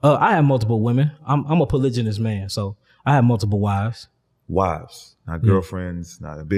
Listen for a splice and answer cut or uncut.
uncut